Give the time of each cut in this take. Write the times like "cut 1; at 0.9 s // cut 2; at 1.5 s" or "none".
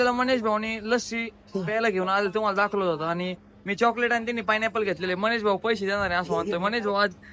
none